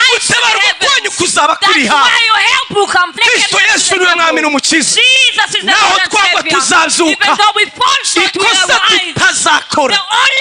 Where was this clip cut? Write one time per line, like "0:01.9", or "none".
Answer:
0:03.1